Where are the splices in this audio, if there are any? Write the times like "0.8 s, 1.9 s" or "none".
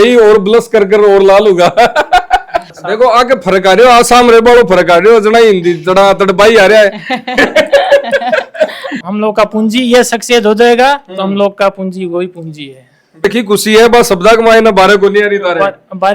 2.6 s, 8.9 s, 13.2 s